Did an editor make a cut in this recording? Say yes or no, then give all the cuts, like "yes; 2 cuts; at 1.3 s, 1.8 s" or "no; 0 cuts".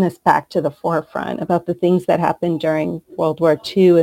no; 0 cuts